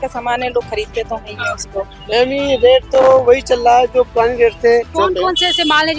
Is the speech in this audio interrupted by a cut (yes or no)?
yes